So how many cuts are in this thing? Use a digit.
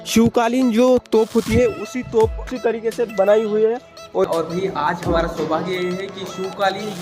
2